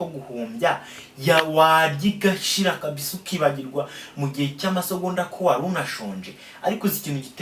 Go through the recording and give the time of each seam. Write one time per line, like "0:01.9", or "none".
none